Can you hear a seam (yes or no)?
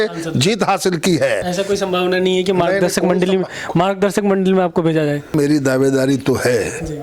yes